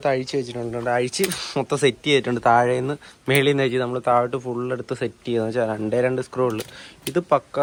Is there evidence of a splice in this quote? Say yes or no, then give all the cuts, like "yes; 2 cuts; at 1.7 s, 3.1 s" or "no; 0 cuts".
no; 0 cuts